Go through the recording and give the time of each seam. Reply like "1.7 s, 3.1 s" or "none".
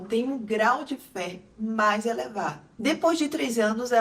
2.7 s